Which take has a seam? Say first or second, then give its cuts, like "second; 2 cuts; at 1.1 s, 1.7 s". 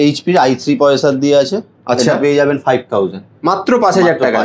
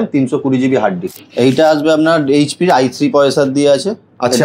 second; 1 cut; at 1.1 s